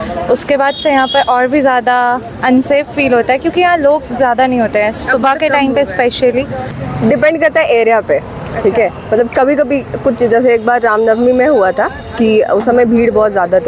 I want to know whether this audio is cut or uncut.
cut